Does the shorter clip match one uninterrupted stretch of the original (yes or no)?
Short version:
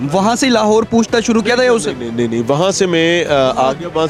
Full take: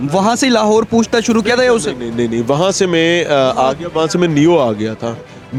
yes